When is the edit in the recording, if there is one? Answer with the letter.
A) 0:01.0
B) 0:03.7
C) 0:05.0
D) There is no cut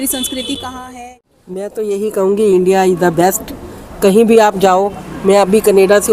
A